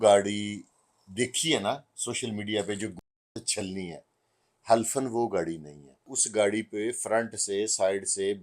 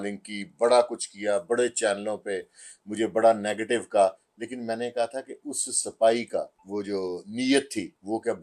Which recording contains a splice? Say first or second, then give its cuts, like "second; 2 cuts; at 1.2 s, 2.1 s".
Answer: first; 1 cut; at 6.2 s